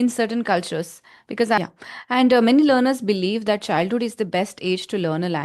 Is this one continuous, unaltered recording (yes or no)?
no